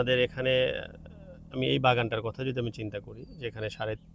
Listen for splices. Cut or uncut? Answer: uncut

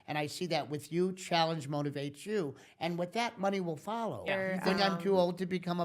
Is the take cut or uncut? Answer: cut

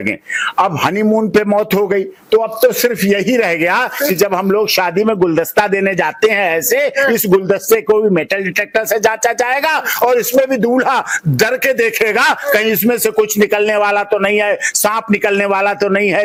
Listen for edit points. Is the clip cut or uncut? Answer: uncut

